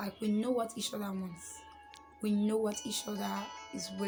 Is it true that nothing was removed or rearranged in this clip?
yes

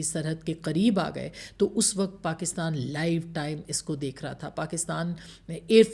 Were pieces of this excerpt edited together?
no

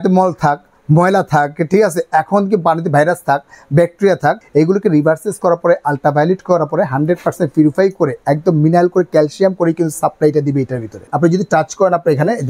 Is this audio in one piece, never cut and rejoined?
no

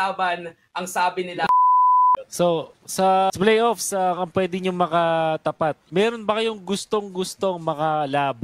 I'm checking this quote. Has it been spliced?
yes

